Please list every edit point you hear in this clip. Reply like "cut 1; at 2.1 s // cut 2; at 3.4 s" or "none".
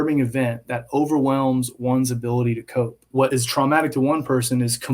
cut 1; at 3.2 s